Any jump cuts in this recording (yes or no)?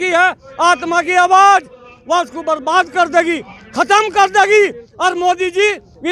no